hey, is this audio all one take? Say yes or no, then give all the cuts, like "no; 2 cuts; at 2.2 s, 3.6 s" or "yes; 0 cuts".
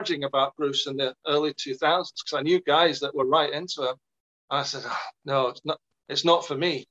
yes; 0 cuts